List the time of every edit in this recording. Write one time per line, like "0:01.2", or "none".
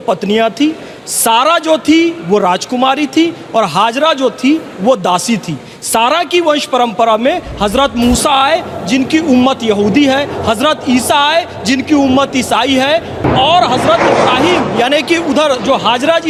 none